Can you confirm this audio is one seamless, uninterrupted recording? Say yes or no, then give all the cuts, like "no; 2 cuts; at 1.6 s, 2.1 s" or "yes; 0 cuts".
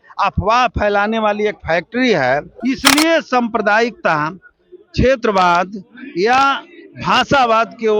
no; 1 cut; at 2.5 s